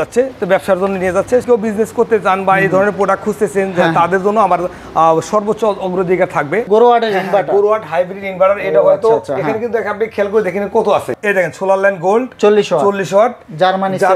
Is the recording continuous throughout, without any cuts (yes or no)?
no